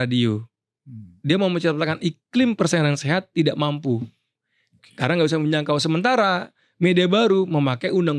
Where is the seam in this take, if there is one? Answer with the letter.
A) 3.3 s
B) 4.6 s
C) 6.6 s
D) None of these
D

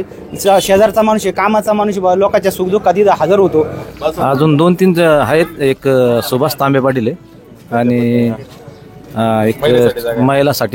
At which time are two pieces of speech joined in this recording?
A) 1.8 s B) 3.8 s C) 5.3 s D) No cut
B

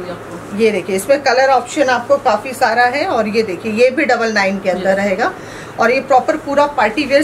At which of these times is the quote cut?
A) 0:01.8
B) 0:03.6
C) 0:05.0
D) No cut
D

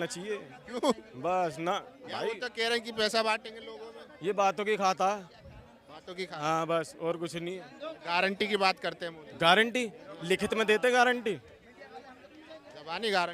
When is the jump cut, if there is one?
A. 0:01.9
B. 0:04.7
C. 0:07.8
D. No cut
D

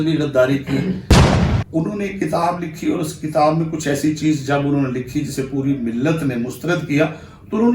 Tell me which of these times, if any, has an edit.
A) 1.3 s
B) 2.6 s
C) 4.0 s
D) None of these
A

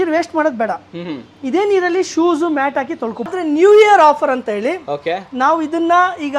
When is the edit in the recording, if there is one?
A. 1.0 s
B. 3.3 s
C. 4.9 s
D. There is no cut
B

